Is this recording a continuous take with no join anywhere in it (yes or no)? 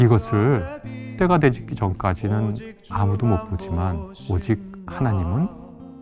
no